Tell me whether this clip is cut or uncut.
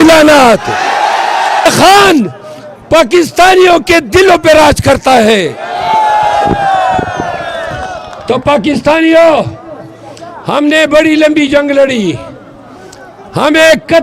cut